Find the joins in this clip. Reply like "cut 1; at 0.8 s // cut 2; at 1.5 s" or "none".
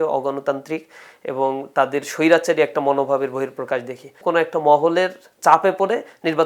cut 1; at 4.1 s